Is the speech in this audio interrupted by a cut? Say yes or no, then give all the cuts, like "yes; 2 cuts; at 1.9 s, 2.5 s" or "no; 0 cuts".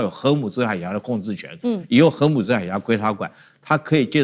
no; 0 cuts